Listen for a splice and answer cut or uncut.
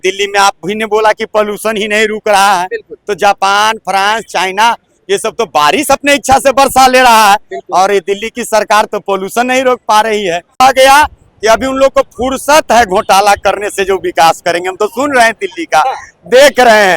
cut